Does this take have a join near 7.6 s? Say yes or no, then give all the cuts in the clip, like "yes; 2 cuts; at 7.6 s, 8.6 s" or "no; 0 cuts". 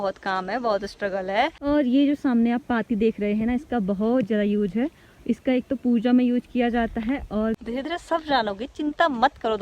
yes; 2 cuts; at 1.6 s, 7.6 s